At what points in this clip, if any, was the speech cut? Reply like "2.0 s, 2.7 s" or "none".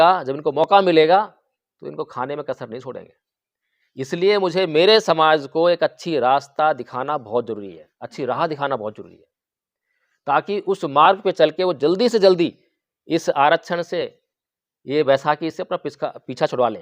none